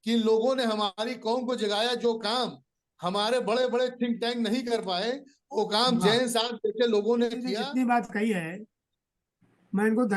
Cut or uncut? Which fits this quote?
cut